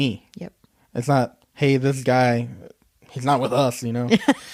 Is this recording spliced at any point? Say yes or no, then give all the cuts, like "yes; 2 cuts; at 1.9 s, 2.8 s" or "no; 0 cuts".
no; 0 cuts